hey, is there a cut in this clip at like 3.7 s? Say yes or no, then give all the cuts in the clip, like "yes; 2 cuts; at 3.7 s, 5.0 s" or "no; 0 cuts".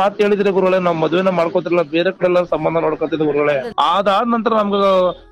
yes; 1 cut; at 3.7 s